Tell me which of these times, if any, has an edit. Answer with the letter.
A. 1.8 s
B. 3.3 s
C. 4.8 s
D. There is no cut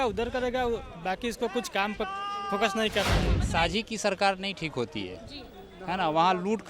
B